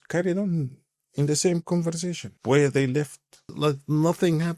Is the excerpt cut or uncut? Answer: cut